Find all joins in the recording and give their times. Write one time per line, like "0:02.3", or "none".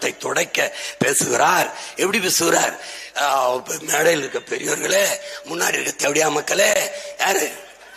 none